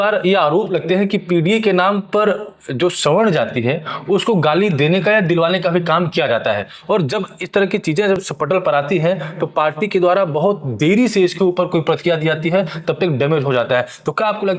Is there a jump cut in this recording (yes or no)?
no